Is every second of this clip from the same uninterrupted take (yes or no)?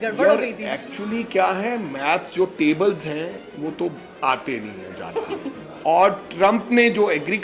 no